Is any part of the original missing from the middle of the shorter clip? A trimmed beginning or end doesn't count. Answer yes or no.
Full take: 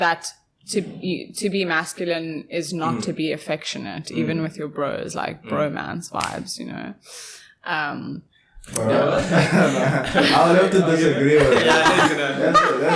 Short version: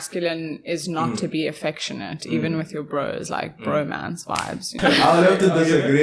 yes